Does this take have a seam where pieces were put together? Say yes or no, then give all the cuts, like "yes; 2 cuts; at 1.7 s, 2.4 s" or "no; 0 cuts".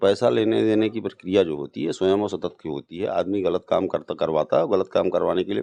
no; 0 cuts